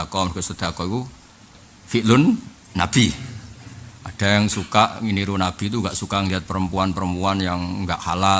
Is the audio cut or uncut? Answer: uncut